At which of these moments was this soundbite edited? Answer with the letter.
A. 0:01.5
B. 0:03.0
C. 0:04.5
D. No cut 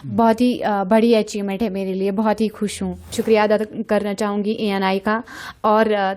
B